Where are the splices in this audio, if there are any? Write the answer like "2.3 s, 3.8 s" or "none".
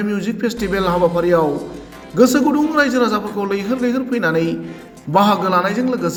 none